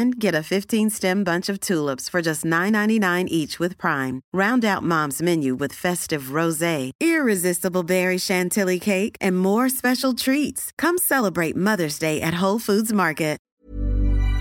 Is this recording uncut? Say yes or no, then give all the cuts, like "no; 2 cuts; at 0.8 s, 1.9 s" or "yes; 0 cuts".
no; 1 cut; at 13.4 s